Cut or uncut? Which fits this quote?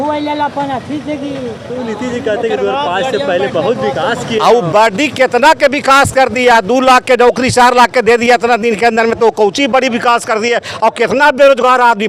uncut